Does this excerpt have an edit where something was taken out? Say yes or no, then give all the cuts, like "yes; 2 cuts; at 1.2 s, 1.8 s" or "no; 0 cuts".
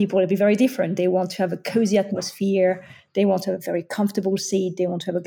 no; 0 cuts